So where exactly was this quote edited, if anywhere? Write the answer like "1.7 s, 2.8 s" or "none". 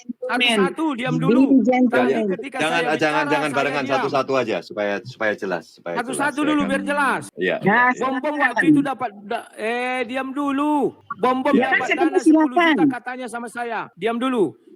7.3 s, 11.0 s, 13.9 s